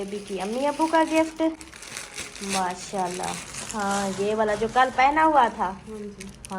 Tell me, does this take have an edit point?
no; 0 cuts

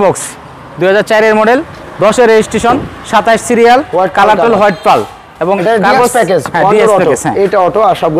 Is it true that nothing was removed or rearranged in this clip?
yes; 0 cuts

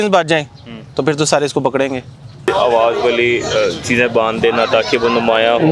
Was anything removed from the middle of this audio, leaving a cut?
yes; 1 cut; at 2.5 s

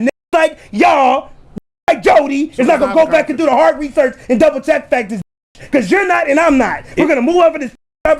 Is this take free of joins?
yes; 0 cuts

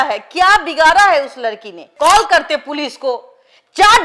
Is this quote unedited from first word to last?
no; 1 cut; at 1.9 s

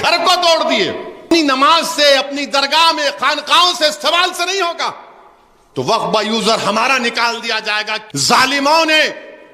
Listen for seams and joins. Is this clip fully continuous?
no; 2 cuts; at 1.3 s, 8.0 s

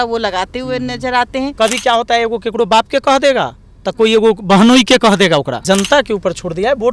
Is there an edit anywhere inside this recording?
yes; 2 cuts; at 1.5 s, 5.6 s

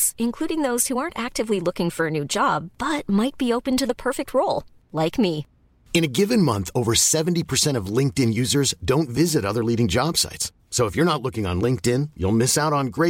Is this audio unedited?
yes; 0 cuts

